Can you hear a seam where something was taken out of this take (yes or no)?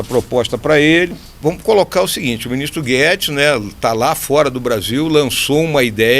yes